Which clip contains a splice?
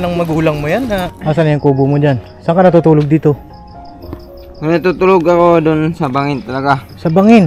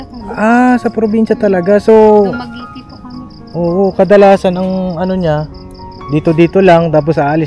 first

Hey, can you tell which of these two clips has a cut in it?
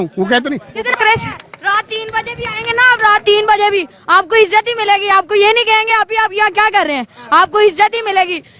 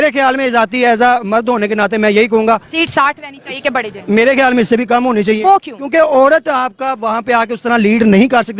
first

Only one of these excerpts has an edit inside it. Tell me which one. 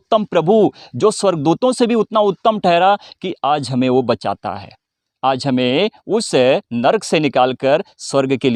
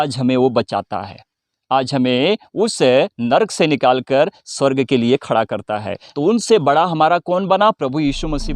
second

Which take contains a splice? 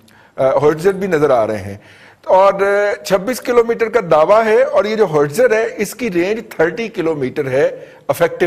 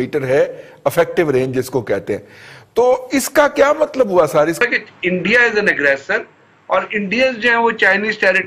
second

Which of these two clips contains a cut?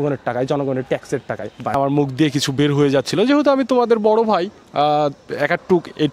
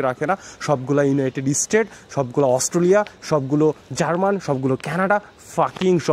first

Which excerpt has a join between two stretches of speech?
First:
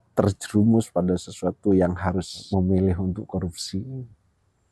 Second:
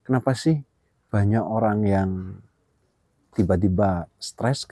first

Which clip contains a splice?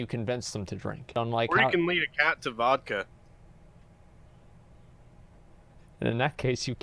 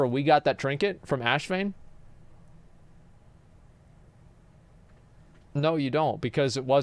first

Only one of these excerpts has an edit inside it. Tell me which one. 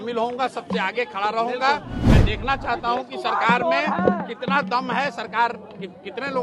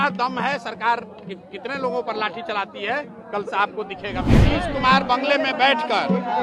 second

